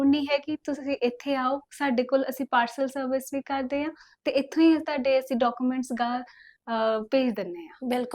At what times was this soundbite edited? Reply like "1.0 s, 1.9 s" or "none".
none

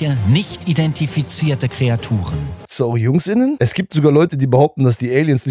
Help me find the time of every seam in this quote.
2.6 s, 3.6 s

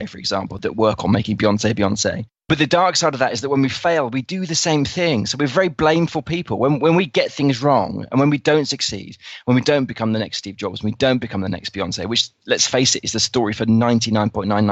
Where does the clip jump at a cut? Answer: none

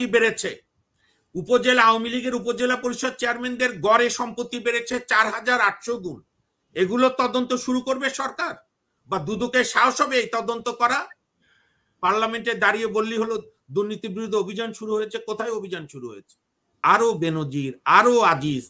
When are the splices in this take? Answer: 16.8 s

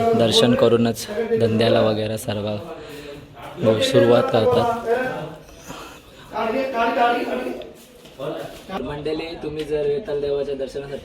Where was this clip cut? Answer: 8.8 s

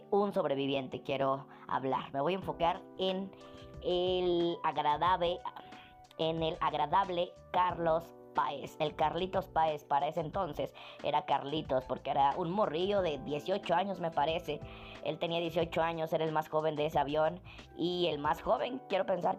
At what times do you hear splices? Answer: none

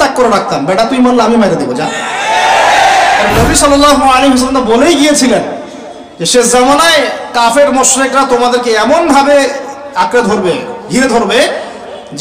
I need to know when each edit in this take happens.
3.3 s

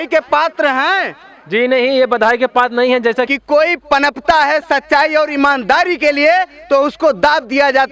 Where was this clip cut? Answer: 3.3 s

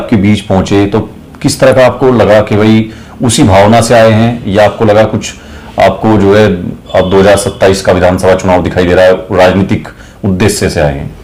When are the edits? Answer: none

